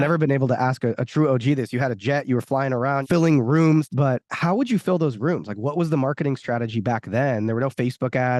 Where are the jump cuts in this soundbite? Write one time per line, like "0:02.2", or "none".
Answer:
0:03.0
0:03.9